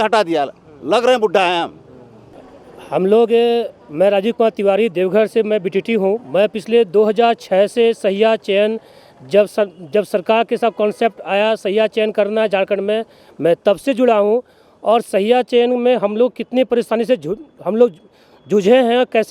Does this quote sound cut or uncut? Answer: uncut